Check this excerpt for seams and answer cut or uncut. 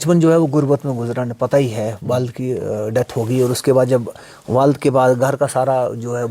uncut